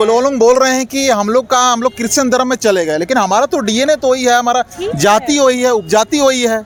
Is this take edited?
no; 0 cuts

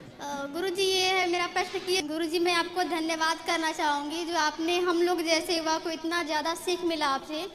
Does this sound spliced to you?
yes; 1 cut; at 2.0 s

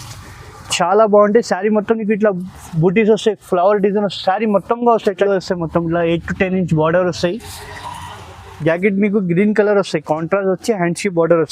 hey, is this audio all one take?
no; 1 cut; at 5.3 s

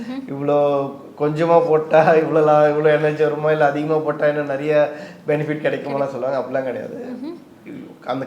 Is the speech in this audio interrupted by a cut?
no; 0 cuts

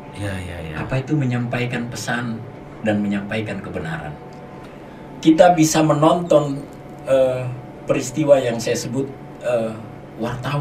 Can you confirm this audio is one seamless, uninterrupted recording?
no; 1 cut; at 4.7 s

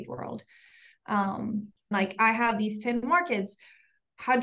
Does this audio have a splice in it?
yes; 1 cut; at 1.9 s

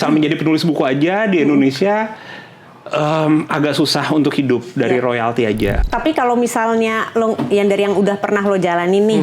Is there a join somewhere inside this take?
yes; 1 cut; at 5.8 s

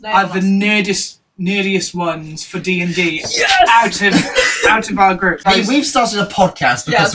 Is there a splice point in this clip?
yes; 1 cut; at 5.4 s

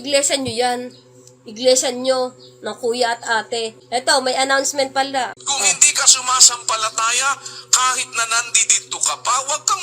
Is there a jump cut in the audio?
yes; 2 cuts; at 3.8 s, 5.3 s

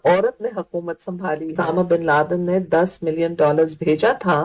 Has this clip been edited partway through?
yes; 1 cut; at 1.7 s

